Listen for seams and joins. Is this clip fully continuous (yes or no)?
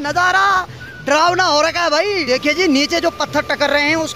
no